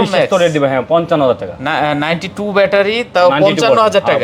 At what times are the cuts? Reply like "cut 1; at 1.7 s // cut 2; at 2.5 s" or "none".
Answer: none